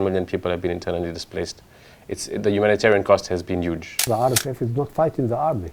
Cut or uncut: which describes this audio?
cut